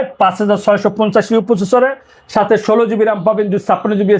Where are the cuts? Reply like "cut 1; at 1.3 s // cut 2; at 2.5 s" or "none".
none